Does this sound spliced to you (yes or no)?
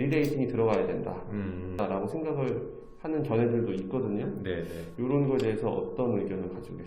yes